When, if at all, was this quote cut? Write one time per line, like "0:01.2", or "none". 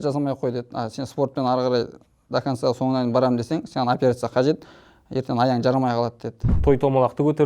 0:06.6